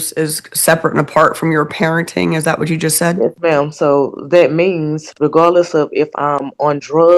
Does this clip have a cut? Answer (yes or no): no